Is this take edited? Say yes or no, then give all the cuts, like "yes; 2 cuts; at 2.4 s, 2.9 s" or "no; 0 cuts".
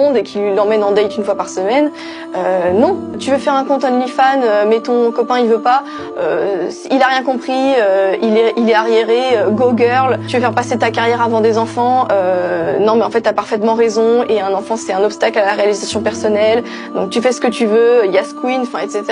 no; 0 cuts